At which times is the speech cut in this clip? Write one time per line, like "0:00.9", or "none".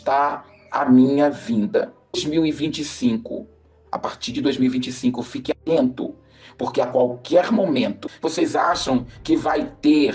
0:02.0
0:08.1